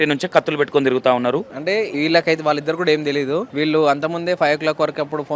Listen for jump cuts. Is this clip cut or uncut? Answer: cut